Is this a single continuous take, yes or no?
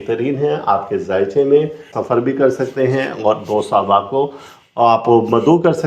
no